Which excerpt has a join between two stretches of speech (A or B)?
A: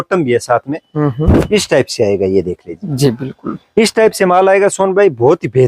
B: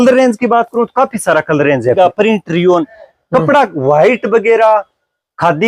B